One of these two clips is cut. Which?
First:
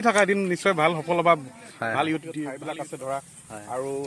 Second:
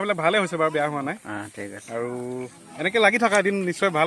first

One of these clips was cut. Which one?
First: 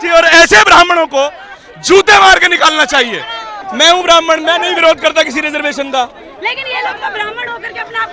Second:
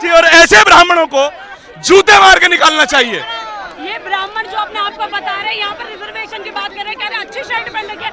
first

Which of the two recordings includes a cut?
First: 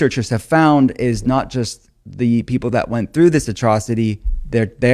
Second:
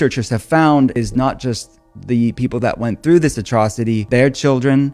second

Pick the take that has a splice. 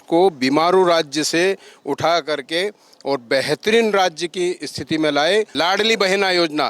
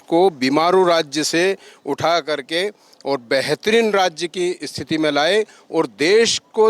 first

